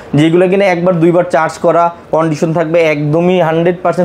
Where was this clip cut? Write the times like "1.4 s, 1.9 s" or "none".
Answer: none